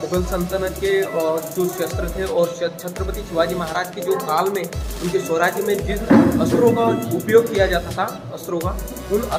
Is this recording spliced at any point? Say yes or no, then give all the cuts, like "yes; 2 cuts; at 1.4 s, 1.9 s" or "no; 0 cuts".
no; 0 cuts